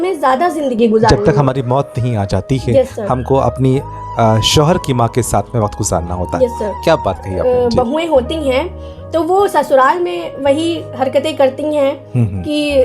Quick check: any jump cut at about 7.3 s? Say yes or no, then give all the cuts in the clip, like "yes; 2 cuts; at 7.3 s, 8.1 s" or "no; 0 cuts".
yes; 1 cut; at 7.3 s